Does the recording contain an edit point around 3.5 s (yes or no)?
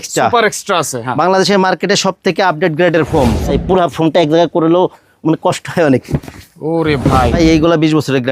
yes